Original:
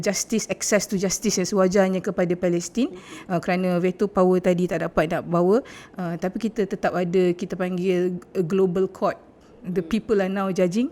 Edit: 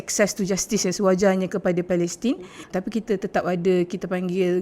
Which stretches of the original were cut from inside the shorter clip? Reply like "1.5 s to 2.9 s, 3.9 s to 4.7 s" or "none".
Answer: 3.1 s to 6.0 s